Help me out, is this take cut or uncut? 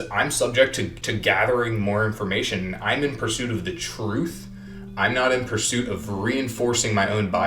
cut